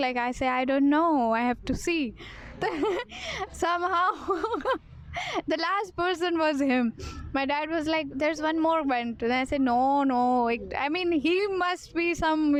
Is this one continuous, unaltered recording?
yes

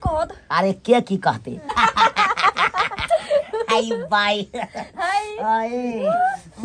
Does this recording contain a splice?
yes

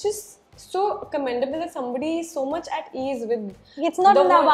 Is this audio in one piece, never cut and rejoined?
yes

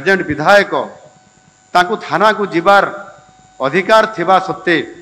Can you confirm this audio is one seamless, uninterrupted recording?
yes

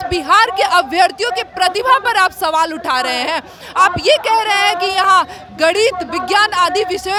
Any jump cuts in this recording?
no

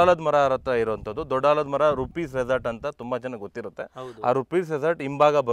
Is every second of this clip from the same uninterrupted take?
yes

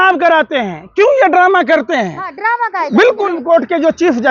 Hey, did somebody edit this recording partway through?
yes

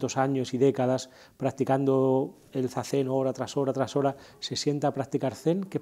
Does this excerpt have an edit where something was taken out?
no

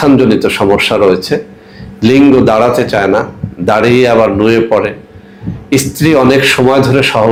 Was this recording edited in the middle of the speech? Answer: no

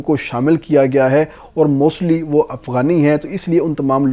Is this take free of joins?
yes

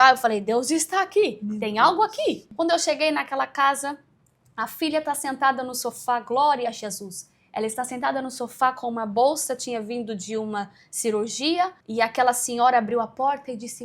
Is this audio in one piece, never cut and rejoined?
no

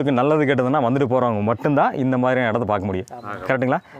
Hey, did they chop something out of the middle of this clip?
no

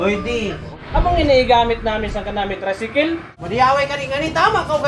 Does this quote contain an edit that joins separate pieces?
yes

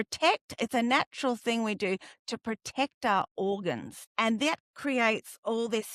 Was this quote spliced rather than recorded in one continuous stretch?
yes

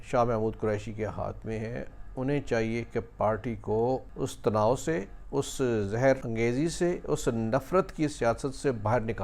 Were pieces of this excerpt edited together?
yes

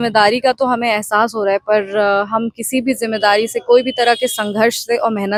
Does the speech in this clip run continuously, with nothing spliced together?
yes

